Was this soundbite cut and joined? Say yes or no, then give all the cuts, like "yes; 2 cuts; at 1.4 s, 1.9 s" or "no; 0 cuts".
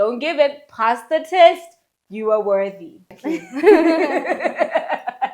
yes; 1 cut; at 3.1 s